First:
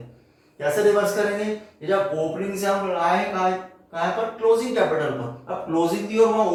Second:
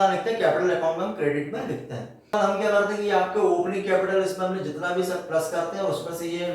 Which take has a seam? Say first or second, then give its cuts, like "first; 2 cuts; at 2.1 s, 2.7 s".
second; 1 cut; at 2.4 s